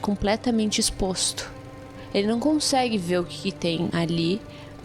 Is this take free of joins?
no; 1 cut; at 3.9 s

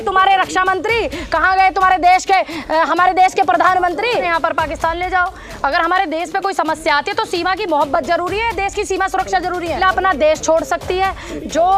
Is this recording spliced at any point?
yes; 2 cuts; at 4.2 s, 9.8 s

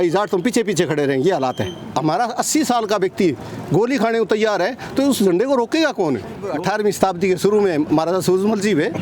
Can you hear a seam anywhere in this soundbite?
yes; 2 cuts; at 1.8 s, 6.5 s

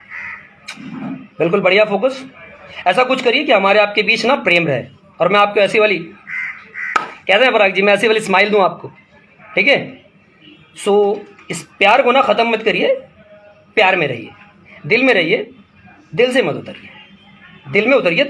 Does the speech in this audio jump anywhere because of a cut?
no; 0 cuts

